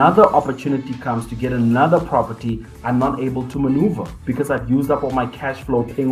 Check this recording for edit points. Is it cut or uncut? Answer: uncut